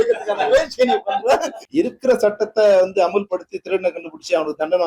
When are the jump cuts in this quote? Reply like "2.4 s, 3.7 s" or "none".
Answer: 1.6 s